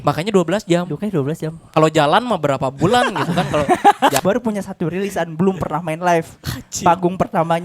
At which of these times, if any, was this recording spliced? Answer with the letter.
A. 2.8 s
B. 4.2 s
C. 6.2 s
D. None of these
B